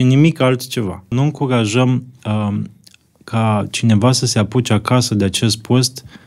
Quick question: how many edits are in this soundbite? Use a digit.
1